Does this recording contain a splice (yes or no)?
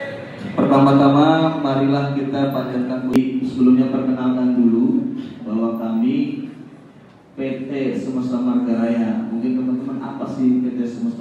yes